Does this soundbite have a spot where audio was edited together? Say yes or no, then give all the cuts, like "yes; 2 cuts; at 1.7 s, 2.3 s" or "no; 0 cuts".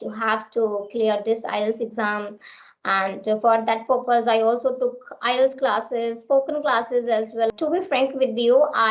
yes; 1 cut; at 7.5 s